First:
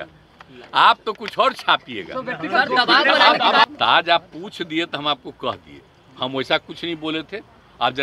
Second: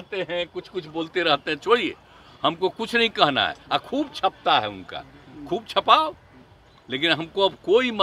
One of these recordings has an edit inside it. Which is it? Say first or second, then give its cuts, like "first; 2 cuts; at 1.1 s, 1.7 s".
first; 1 cut; at 3.6 s